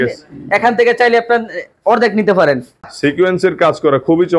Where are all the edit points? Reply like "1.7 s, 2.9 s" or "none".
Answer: 2.9 s